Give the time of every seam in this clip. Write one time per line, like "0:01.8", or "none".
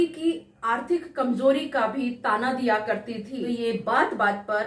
0:03.3